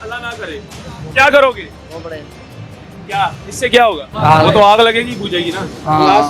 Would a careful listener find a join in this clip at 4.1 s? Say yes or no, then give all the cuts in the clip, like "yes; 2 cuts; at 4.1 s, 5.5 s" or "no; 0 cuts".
yes; 1 cut; at 4.1 s